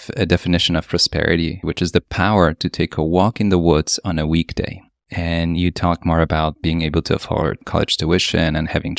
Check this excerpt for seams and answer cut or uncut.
cut